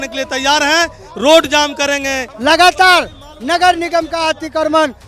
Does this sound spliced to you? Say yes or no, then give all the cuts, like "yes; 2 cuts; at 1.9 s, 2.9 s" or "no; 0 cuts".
yes; 1 cut; at 2.2 s